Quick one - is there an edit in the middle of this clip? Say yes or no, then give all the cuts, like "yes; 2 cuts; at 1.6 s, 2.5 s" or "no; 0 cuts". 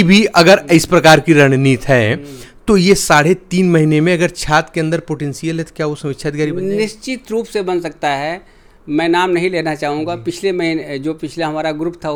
no; 0 cuts